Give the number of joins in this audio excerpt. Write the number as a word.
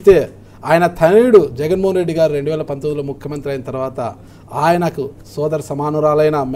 zero